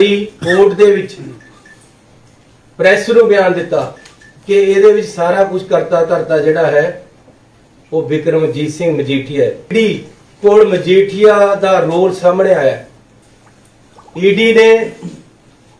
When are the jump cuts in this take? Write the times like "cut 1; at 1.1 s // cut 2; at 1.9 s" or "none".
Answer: cut 1; at 9.7 s